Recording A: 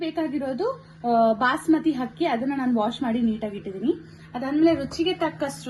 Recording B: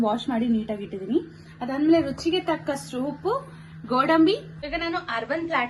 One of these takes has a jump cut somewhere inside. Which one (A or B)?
B